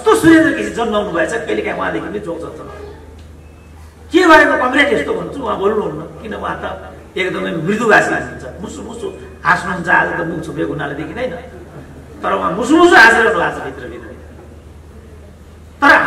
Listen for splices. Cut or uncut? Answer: uncut